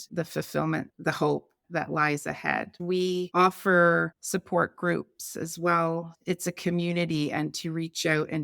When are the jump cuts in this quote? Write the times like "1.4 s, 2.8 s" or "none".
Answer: 2.8 s